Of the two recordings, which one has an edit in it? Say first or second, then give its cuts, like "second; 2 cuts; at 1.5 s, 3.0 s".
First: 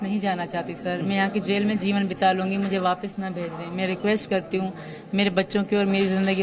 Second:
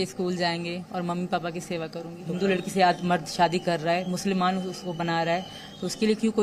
second; 1 cut; at 2.2 s